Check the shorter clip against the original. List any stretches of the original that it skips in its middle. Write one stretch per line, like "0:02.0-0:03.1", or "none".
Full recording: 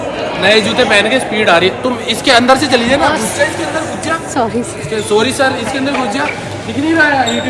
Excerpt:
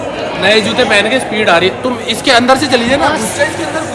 none